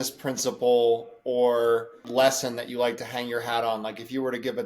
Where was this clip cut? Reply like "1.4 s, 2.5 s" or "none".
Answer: 2.0 s